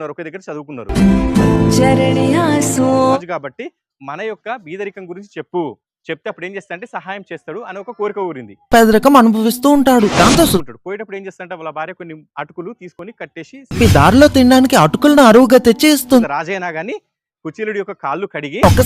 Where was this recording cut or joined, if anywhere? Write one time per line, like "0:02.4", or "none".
0:03.2
0:10.6
0:16.2